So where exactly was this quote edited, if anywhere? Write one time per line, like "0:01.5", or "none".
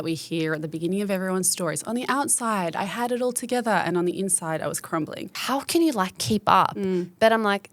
0:05.4